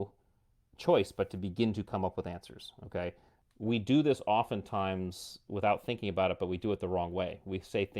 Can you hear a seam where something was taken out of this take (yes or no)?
yes